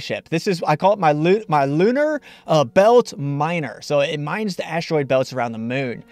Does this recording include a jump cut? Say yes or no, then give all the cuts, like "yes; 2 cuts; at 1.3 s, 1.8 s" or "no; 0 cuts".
yes; 1 cut; at 4.7 s